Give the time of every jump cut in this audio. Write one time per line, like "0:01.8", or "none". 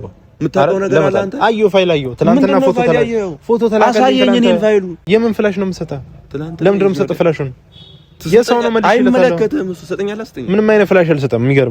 0:05.0